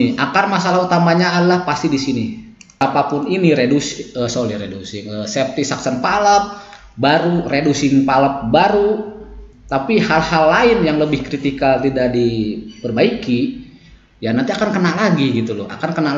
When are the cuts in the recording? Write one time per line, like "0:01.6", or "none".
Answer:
0:02.8

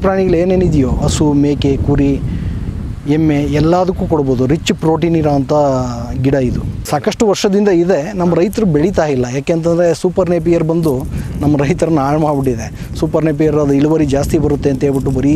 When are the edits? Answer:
0:01.0
0:06.9

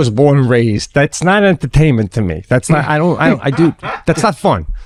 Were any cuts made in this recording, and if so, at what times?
none

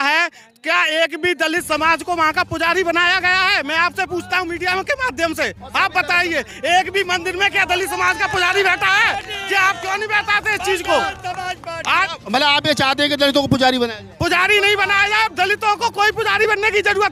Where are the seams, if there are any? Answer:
none

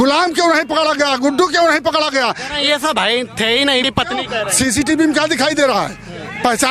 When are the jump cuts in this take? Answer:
0:03.8

